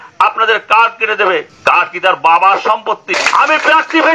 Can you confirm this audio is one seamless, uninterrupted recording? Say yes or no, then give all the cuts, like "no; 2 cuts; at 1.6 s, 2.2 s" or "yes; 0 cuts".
no; 2 cuts; at 1.5 s, 3.1 s